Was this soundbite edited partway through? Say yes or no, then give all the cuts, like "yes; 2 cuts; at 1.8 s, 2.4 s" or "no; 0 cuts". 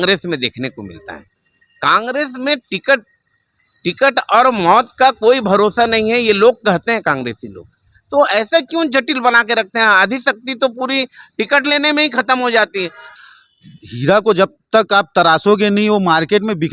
yes; 1 cut; at 13.1 s